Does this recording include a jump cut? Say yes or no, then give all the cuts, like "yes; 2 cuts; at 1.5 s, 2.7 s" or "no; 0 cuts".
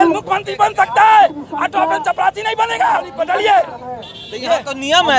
yes; 1 cut; at 3.1 s